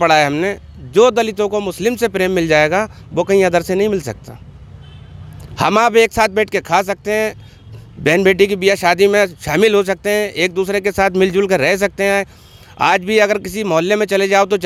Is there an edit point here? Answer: no; 0 cuts

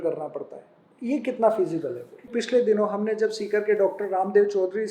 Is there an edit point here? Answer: yes; 1 cut; at 2.2 s

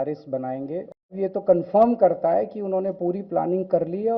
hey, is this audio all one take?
no; 1 cut; at 1.1 s

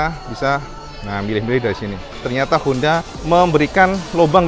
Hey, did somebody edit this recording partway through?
yes; 2 cuts; at 2.2 s, 3.1 s

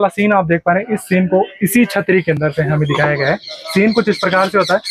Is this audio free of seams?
yes; 0 cuts

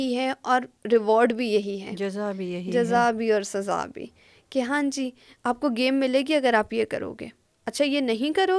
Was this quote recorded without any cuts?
yes; 0 cuts

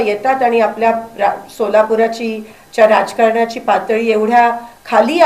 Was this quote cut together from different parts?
no; 0 cuts

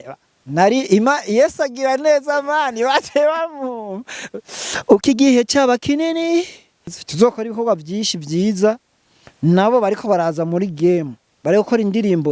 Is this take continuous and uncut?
no; 1 cut; at 6.9 s

